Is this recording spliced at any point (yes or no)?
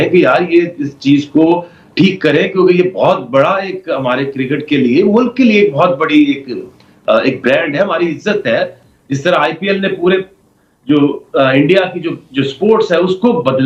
no